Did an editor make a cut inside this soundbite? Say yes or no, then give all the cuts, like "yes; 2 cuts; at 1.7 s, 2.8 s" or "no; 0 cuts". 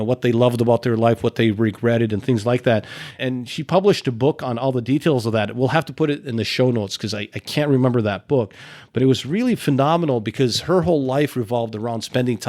no; 0 cuts